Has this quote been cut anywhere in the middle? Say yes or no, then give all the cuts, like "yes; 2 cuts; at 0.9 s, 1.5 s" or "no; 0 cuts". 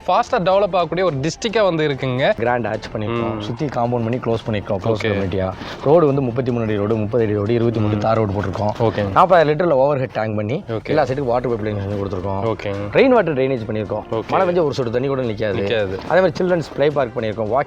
yes; 1 cut; at 2.4 s